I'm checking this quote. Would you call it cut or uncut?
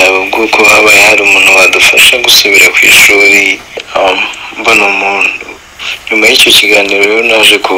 uncut